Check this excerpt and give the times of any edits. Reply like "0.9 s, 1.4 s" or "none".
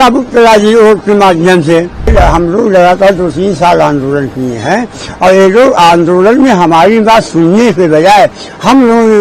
2.1 s